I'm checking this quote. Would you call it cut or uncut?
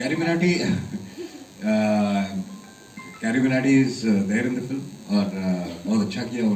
uncut